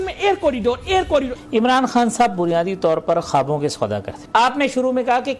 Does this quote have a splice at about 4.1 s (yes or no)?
yes